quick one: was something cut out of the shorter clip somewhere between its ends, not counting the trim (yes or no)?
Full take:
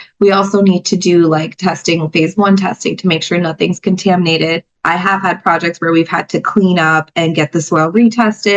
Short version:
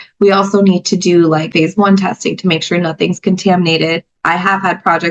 yes